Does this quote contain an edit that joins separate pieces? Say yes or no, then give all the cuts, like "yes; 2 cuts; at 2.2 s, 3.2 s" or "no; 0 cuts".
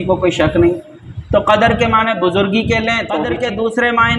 yes; 1 cut; at 3.2 s